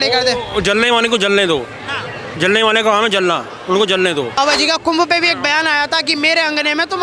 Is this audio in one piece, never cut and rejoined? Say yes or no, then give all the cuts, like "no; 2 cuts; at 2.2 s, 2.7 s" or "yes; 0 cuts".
no; 1 cut; at 4.4 s